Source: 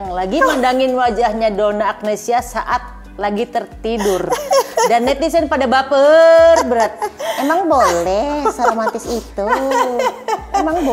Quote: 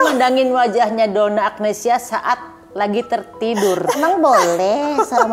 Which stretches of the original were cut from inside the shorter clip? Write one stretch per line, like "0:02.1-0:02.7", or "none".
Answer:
0:04.4-0:07.4

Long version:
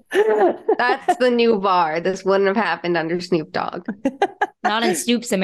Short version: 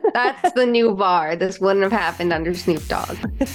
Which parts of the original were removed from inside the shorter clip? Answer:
none

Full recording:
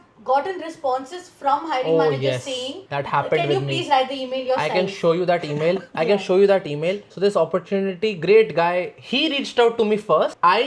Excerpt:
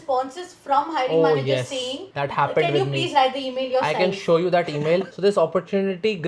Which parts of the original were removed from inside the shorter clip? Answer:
0:05.9-0:07.1

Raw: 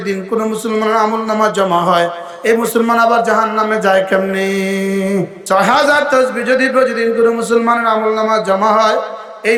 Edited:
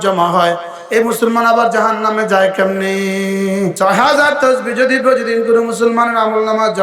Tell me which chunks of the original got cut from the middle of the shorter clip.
0:05.3-0:05.4

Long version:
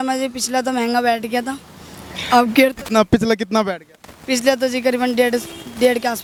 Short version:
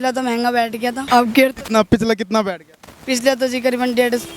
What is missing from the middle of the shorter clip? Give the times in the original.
0:01.5-0:02.2

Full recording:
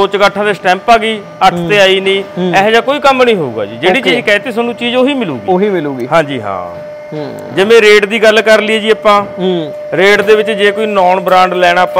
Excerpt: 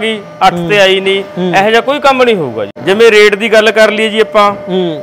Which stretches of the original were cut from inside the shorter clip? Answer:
0:03.7-0:07.4

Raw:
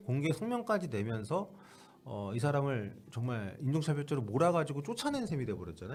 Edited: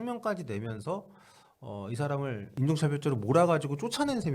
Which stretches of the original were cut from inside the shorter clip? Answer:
0:02.9-0:03.5

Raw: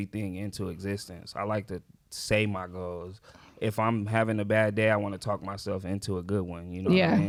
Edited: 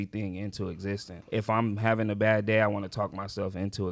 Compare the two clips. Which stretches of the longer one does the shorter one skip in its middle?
0:01.1-0:03.4

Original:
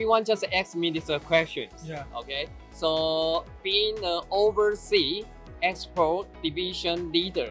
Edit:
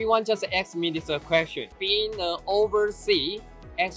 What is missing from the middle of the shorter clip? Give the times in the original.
0:01.7-0:03.6

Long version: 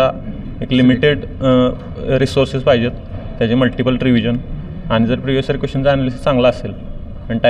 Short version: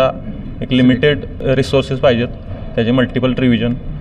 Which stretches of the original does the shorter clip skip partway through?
0:01.3-0:01.9

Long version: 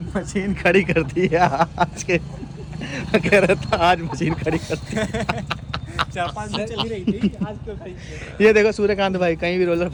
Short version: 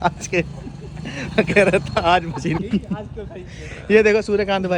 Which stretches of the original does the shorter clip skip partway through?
0:04.4-0:07.1

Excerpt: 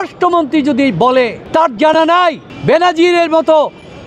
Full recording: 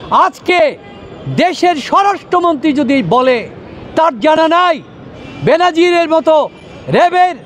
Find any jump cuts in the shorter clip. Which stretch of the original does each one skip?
0:03.5-0:03.8
0:04.9-0:05.3

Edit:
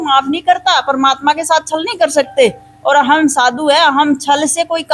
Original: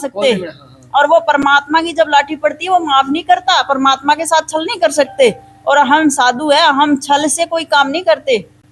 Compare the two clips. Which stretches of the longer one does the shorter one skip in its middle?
none

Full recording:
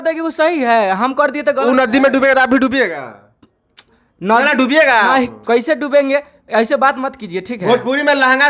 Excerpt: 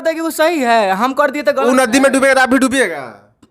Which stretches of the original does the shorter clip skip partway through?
none

